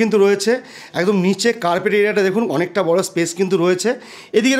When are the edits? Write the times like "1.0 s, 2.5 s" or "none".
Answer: none

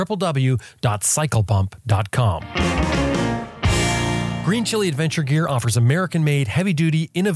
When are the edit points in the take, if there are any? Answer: 2.5 s, 4.4 s

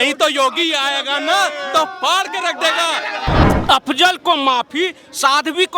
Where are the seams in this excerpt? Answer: 3.4 s

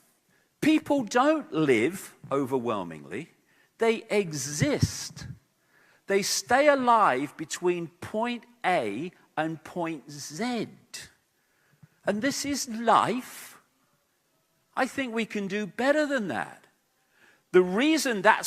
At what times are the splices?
7.0 s

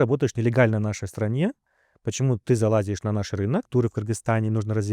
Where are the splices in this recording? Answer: 3.7 s

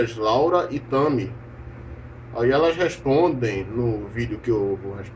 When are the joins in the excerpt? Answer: 4.0 s

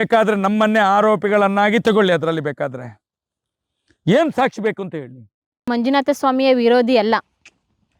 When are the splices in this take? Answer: 5.7 s

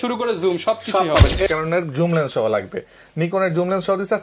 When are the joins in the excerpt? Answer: 1.5 s

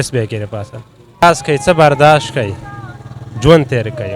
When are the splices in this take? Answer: 1.2 s

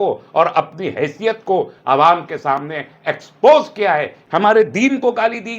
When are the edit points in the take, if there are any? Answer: 4.5 s

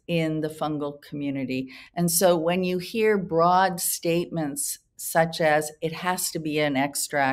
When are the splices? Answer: none

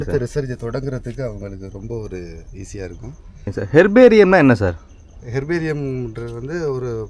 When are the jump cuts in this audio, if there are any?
3.5 s

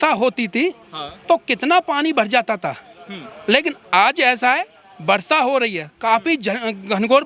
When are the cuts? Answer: none

